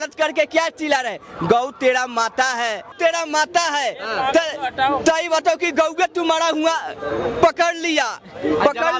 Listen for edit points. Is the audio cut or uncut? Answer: cut